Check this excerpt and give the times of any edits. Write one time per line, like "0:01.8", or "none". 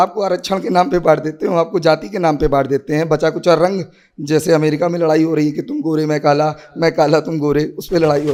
none